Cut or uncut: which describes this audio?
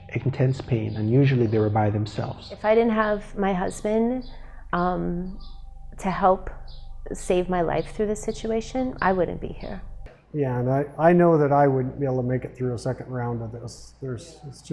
cut